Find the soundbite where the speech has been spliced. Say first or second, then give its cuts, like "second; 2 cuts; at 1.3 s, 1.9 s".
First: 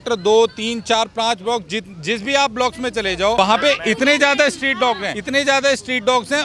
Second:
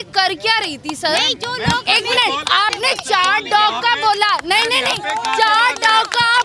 first; 2 cuts; at 3.4 s, 5.1 s